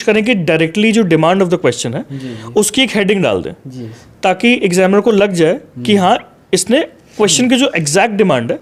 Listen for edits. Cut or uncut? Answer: uncut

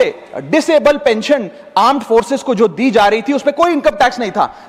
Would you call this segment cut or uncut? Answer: uncut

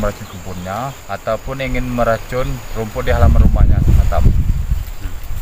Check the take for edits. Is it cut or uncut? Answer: cut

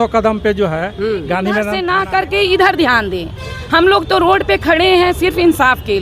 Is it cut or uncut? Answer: cut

